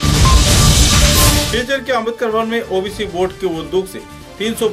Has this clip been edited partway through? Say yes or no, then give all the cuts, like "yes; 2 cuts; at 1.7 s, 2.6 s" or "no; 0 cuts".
yes; 1 cut; at 1.4 s